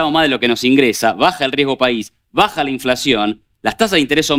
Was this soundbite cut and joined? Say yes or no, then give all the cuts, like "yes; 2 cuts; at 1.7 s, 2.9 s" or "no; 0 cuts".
no; 0 cuts